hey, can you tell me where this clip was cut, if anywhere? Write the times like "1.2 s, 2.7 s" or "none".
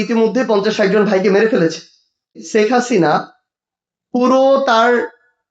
2.4 s